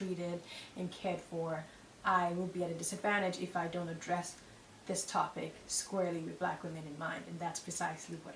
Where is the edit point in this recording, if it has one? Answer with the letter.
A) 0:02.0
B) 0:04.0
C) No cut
C